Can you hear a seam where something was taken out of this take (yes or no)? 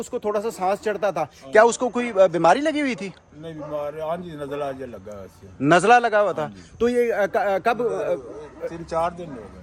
no